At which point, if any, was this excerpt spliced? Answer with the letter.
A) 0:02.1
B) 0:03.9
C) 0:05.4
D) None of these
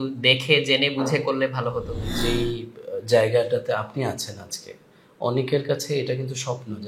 A